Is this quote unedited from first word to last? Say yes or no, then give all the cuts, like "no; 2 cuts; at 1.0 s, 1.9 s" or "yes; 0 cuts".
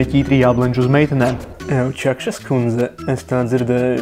no; 1 cut; at 1.5 s